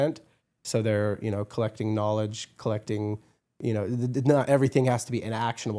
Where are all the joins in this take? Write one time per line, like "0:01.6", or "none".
none